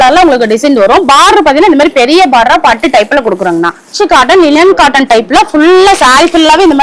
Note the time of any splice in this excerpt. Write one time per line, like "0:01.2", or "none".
0:03.9